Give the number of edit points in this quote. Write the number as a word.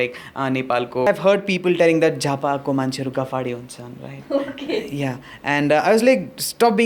one